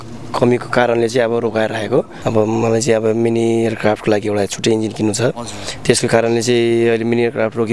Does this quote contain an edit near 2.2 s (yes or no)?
yes